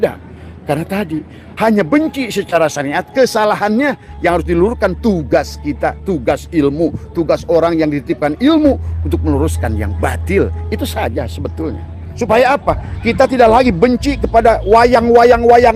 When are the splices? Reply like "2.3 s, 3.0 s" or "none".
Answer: 12.0 s